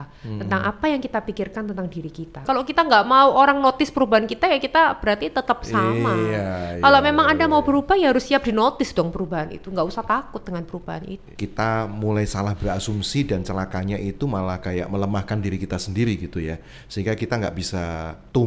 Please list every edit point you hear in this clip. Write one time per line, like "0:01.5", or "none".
0:02.4
0:11.2

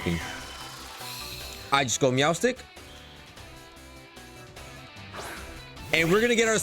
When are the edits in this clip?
0:01.7

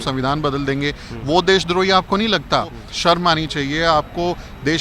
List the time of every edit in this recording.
0:02.8

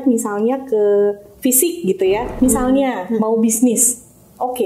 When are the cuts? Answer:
0:02.3

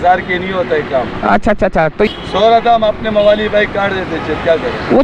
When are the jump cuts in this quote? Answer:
0:02.1

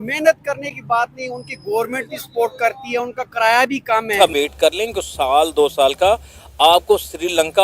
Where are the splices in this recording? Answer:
0:04.1

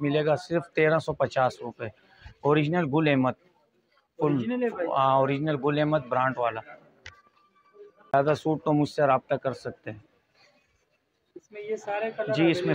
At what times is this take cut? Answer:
0:08.1

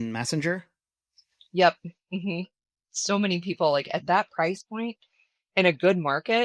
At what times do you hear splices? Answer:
none

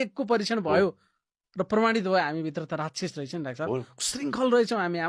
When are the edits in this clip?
none

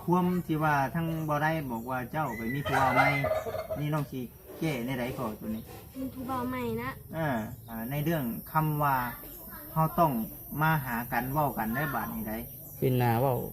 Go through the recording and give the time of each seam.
0:07.7

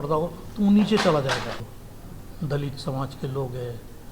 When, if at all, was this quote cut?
0:01.7

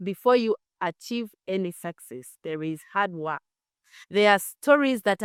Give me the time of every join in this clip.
none

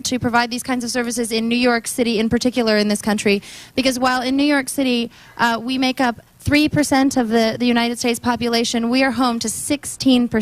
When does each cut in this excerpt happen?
none

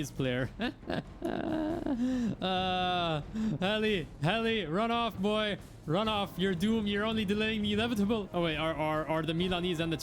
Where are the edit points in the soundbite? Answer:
0:08.3

